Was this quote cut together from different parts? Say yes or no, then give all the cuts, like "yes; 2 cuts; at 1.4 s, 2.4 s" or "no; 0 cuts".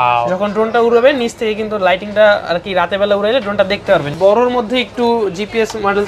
yes; 1 cut; at 4.1 s